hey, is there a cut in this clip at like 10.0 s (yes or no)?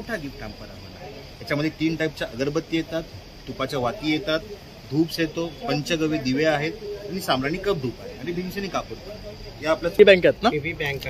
yes